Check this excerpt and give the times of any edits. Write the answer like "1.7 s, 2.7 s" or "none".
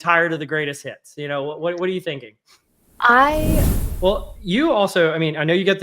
3.7 s